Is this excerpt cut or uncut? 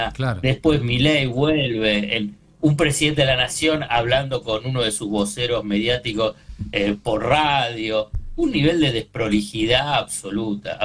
uncut